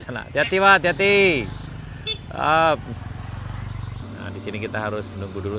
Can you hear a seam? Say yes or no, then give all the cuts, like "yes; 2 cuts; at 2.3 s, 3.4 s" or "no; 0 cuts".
yes; 1 cut; at 4.0 s